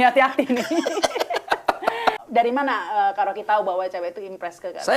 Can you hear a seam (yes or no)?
yes